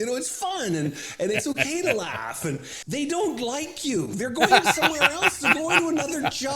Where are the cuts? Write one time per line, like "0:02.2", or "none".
0:02.7